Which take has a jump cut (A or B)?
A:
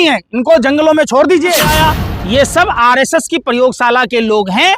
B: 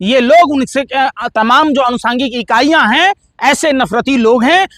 A